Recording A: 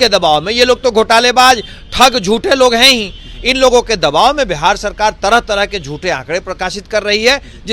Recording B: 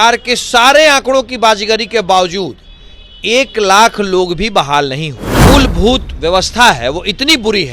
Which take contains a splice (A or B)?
B